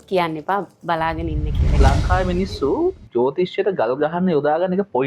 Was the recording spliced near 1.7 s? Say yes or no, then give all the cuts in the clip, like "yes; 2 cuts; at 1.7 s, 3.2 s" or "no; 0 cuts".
yes; 1 cut; at 1.7 s